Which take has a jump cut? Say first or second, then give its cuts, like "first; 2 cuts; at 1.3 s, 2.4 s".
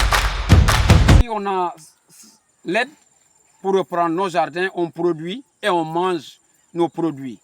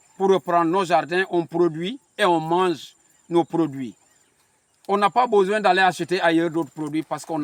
first; 1 cut; at 1.2 s